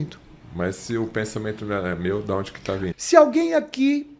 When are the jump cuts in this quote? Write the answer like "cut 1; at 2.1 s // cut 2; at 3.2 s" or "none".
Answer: cut 1; at 2.9 s